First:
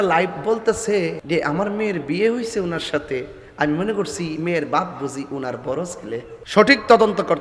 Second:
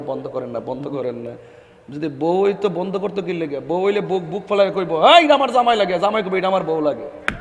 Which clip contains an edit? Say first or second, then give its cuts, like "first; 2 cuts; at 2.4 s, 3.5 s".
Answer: first; 2 cuts; at 1.2 s, 6.4 s